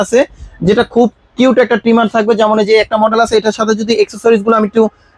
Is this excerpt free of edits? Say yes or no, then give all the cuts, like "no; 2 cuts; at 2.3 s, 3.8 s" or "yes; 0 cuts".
yes; 0 cuts